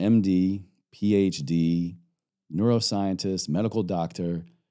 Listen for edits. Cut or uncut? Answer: uncut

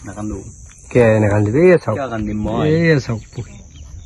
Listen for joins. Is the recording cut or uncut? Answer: uncut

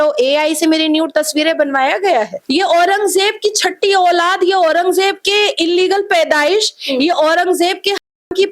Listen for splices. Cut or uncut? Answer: cut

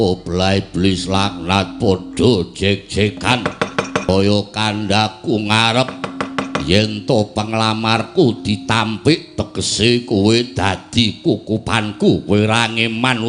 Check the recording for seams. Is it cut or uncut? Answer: cut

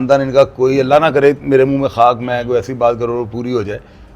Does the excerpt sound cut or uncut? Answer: uncut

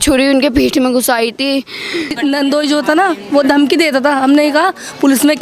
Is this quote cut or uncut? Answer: cut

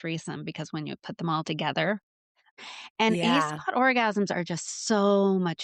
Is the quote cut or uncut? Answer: cut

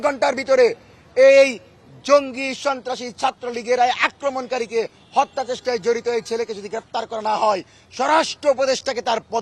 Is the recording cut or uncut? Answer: uncut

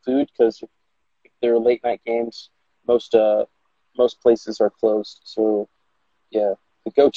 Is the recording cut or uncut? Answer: uncut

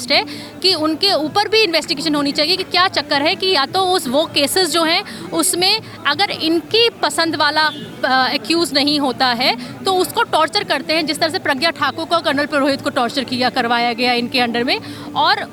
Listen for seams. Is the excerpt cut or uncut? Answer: uncut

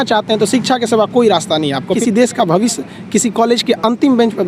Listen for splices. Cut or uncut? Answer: cut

